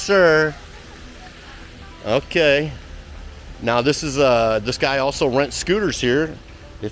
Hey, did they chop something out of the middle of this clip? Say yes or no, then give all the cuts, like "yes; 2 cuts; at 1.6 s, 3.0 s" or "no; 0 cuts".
no; 0 cuts